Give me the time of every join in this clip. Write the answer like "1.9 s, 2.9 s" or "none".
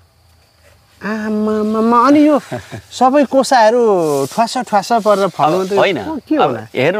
none